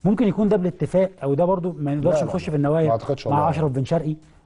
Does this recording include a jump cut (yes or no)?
no